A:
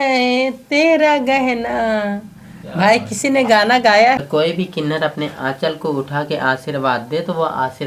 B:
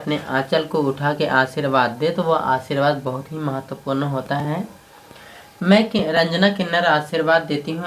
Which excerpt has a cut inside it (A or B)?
A